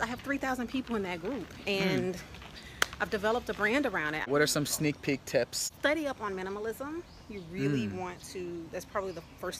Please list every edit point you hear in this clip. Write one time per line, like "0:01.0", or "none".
0:04.3
0:05.6